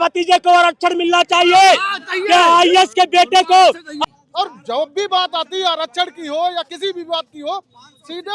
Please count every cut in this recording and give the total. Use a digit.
1